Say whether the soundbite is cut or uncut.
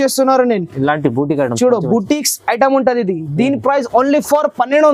uncut